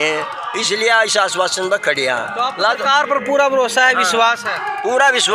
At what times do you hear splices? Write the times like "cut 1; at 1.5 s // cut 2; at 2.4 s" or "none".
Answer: none